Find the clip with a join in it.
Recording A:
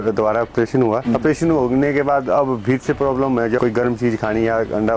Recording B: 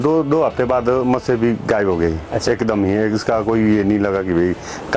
A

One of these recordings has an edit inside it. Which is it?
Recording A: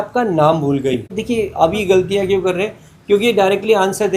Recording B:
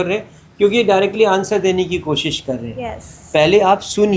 A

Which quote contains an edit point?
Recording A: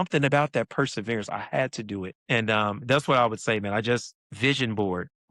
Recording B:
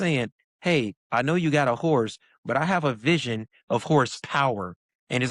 A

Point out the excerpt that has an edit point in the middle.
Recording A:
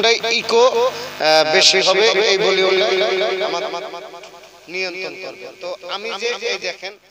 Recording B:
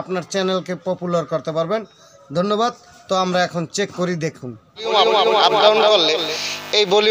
B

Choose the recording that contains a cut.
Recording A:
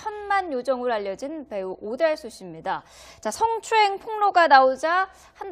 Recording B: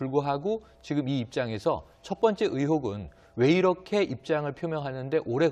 B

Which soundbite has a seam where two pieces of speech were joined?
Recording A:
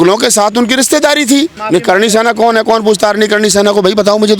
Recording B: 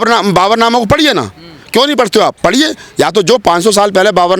A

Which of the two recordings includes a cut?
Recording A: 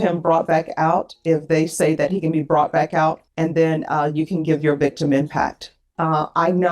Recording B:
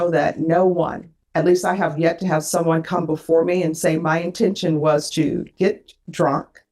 A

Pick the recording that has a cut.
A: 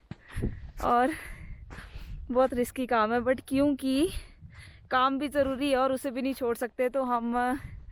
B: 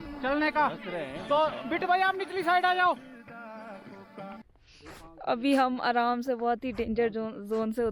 B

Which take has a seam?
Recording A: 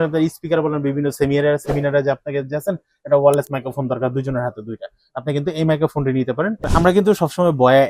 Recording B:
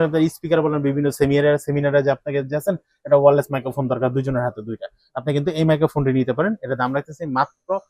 A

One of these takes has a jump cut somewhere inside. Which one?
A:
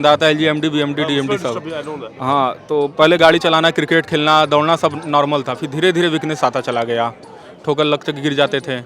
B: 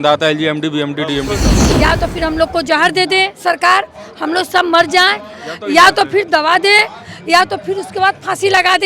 B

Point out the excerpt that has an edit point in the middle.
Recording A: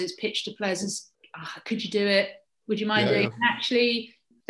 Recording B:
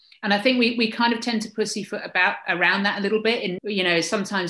B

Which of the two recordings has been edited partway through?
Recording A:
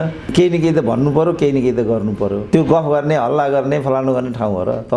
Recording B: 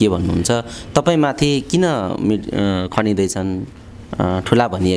A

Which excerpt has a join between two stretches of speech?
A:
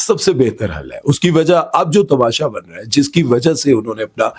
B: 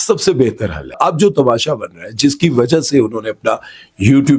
B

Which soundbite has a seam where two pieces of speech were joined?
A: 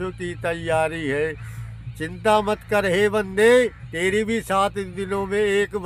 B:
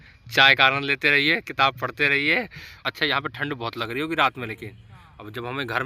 B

